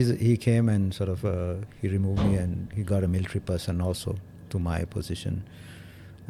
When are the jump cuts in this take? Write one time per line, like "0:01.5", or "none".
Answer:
none